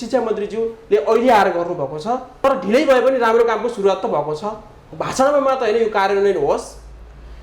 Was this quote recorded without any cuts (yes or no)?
no